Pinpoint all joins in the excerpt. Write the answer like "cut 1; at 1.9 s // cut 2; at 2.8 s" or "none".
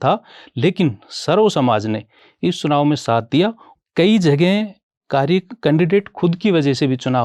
cut 1; at 3.7 s

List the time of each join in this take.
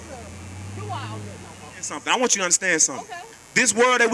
cut 1; at 1.9 s

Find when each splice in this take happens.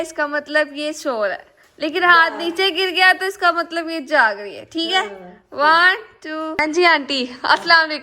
cut 1; at 6.6 s

